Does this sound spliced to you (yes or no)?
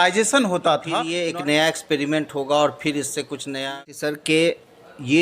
yes